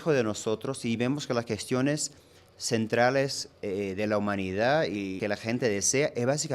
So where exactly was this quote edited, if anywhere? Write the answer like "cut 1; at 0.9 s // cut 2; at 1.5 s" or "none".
cut 1; at 5.2 s